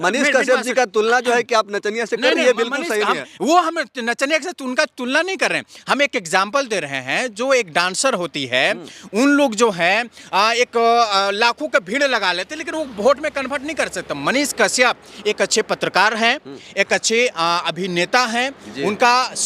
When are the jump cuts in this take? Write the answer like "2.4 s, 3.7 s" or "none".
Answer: none